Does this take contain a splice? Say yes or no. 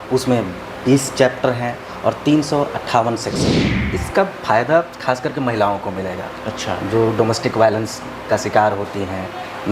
yes